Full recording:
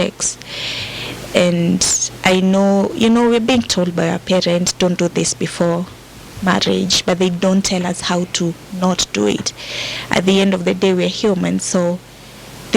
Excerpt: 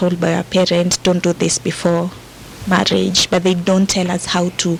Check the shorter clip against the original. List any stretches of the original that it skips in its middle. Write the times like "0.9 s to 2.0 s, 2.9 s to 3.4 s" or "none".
none